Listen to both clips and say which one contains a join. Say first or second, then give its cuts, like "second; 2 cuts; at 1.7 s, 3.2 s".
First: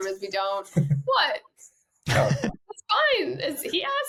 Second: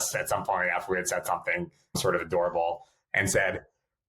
second; 1 cut; at 2.0 s